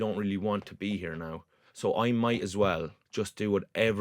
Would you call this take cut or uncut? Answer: cut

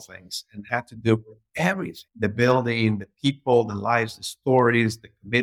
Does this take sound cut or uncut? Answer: cut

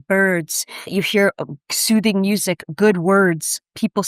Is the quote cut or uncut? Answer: cut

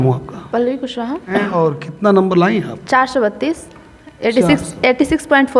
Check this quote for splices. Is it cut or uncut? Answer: cut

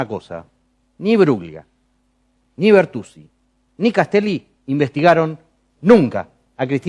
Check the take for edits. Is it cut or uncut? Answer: uncut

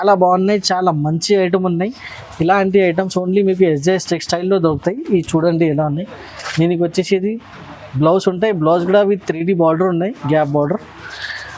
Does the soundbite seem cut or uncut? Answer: uncut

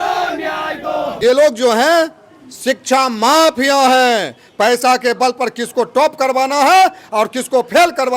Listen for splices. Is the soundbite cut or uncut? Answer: cut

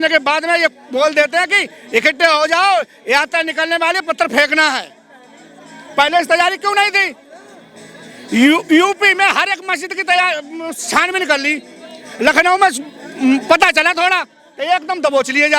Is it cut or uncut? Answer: uncut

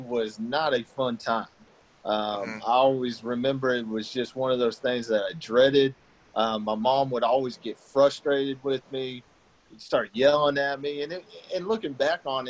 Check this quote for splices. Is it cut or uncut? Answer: uncut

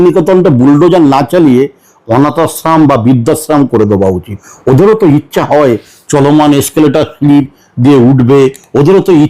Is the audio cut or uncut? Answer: cut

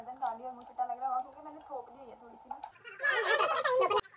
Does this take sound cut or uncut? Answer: cut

